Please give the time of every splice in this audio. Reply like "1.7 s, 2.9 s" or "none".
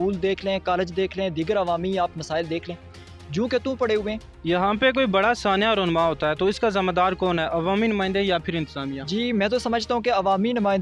4.3 s

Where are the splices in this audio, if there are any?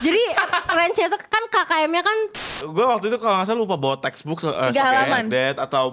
2.4 s

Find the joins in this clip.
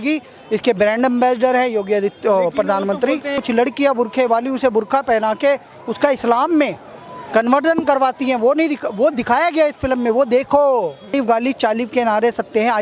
3.4 s, 11.1 s

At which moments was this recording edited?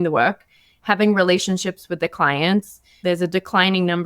3.0 s

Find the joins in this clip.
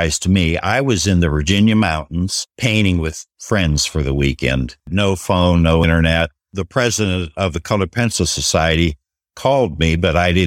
2.4 s, 3.3 s, 4.9 s, 6.2 s

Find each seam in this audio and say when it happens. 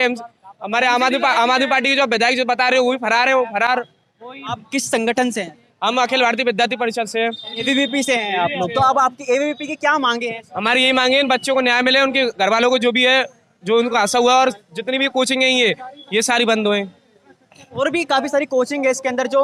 none

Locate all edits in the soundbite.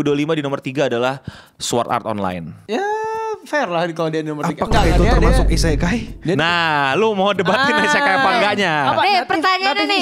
none

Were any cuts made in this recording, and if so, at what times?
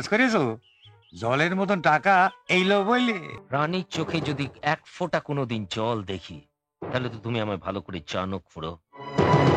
3.3 s

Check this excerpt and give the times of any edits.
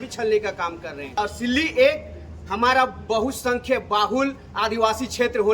1.2 s

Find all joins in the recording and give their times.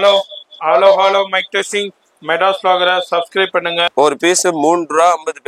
3.9 s

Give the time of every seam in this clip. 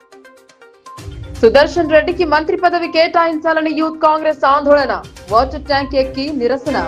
0.9 s

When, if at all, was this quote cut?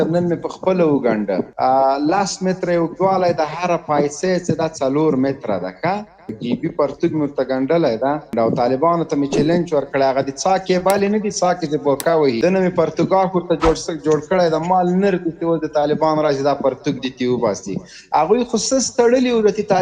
1.5 s, 6.4 s, 8.3 s, 12.4 s

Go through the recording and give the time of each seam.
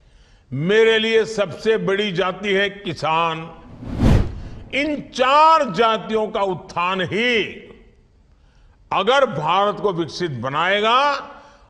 none

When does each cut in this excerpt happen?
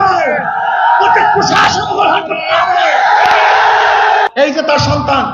4.3 s

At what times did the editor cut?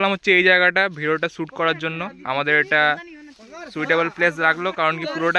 none

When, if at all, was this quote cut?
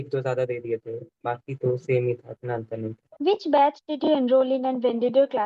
none

